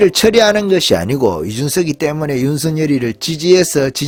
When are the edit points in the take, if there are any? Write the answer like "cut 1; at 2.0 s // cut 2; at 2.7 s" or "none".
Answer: none

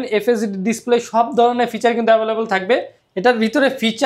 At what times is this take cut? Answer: cut 1; at 3.0 s

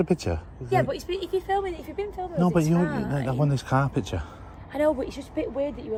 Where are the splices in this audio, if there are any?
none

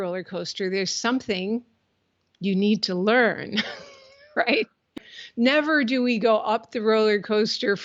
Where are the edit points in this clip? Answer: cut 1; at 4.9 s

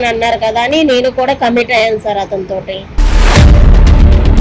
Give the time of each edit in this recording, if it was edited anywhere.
none

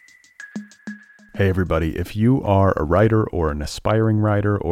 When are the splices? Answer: cut 1; at 0.9 s

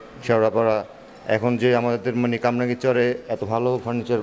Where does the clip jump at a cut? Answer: none

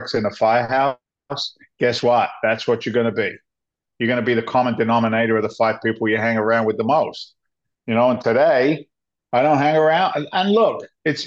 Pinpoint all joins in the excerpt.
none

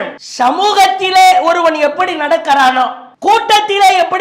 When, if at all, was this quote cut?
none

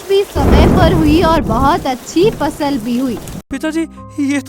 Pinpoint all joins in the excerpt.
cut 1; at 3.4 s

